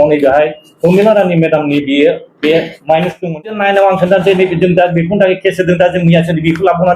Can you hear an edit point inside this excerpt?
yes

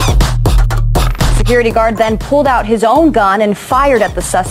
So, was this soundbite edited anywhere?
yes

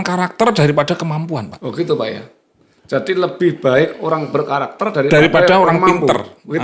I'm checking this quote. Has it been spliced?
no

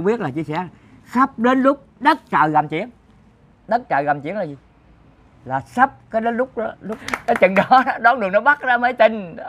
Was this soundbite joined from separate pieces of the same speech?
yes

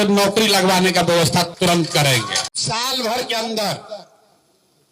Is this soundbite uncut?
no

